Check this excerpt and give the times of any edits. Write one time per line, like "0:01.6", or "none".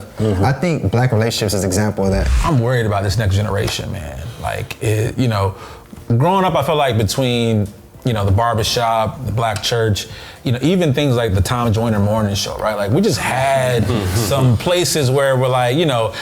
0:02.2